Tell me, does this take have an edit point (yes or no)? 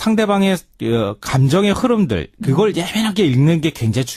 yes